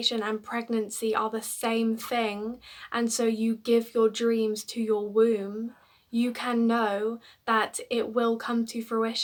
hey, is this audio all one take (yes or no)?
yes